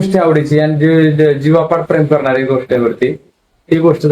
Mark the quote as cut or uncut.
uncut